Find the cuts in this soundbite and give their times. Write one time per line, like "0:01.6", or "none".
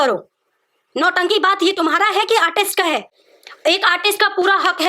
none